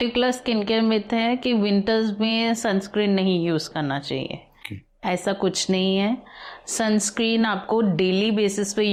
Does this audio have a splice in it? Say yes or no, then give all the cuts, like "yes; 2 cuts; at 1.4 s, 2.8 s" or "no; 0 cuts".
no; 0 cuts